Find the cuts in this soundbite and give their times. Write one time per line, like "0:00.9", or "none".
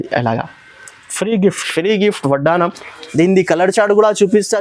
none